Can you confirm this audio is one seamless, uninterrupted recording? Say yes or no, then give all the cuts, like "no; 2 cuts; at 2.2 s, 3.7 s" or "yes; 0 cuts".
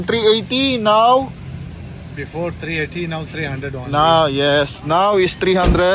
yes; 0 cuts